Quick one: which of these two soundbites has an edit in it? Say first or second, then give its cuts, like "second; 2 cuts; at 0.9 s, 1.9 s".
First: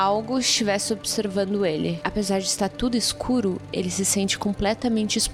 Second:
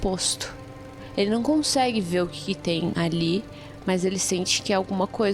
second; 1 cut; at 2.9 s